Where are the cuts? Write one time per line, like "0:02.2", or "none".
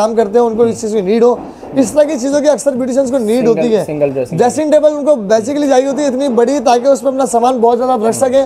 none